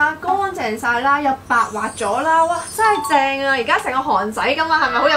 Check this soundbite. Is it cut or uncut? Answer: uncut